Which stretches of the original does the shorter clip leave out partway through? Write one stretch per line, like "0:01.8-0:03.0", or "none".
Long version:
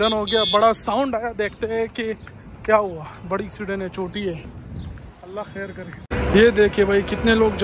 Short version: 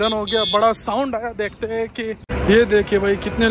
0:02.2-0:06.1